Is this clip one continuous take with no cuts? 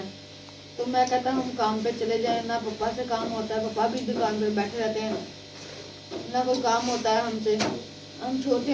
yes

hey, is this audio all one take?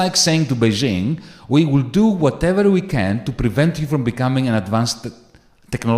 yes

